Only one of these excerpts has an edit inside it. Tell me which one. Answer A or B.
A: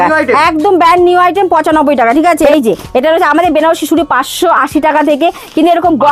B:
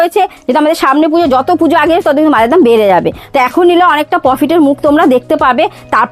A